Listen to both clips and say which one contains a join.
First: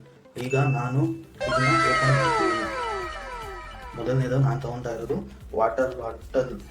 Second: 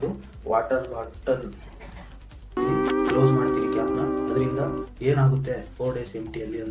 second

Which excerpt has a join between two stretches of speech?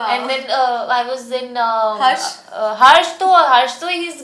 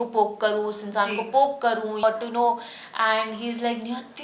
second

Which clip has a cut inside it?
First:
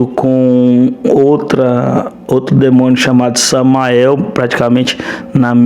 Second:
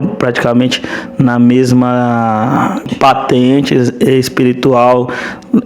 second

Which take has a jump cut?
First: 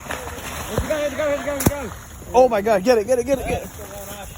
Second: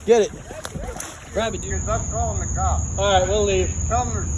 second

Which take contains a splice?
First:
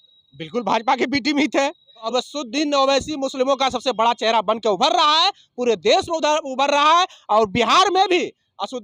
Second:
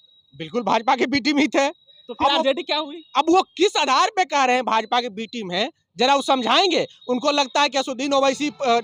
first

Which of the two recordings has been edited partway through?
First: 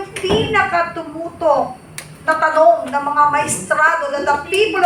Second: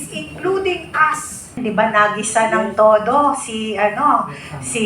second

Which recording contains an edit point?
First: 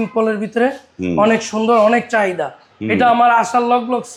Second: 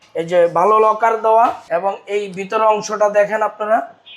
second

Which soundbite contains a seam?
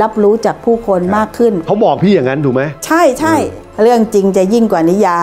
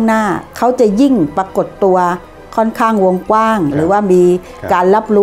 first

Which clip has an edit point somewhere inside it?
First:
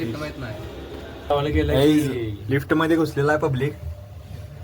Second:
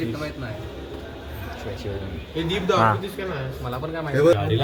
first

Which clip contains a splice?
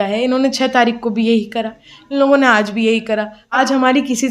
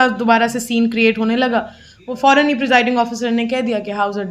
first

